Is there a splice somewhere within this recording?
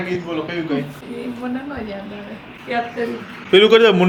no; 0 cuts

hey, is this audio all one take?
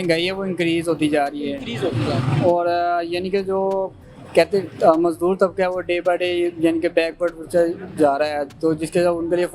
yes; 0 cuts

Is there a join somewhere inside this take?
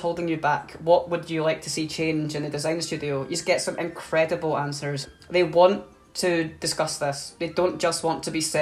yes; 1 cut; at 4.9 s

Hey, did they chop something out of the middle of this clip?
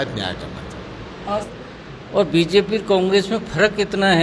yes; 1 cut; at 1.4 s

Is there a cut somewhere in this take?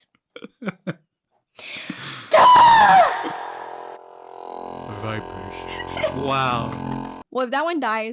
yes; 1 cut; at 7.1 s

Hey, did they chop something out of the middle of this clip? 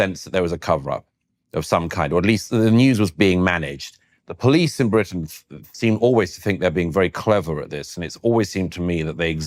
no; 0 cuts

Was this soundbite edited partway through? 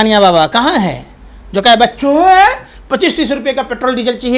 no; 0 cuts

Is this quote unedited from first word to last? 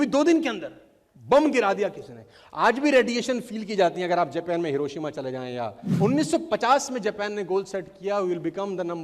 no; 1 cut; at 5.8 s

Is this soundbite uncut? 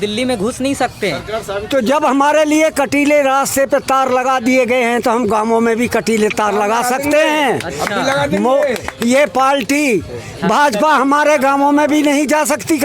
yes; 0 cuts

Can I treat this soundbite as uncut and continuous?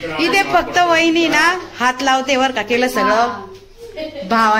yes; 0 cuts

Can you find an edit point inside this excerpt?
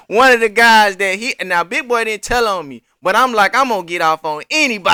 no; 0 cuts

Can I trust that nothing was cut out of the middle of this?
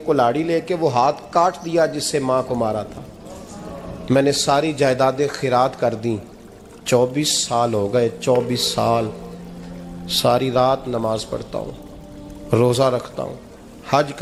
yes; 0 cuts

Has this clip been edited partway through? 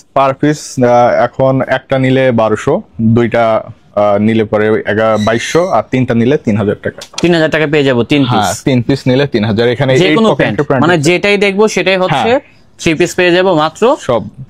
no; 0 cuts

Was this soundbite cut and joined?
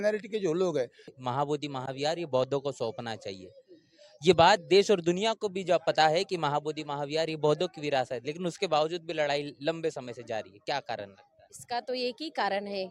yes; 1 cut; at 1.0 s

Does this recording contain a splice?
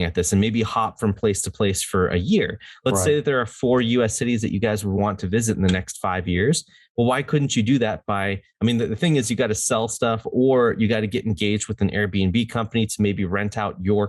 no; 0 cuts

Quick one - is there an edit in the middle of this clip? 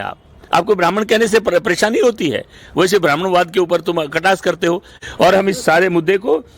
yes; 1 cut; at 4.9 s

